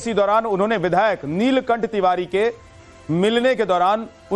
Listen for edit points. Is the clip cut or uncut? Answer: cut